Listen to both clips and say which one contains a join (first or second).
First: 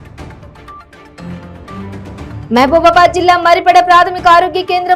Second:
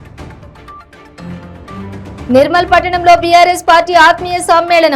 first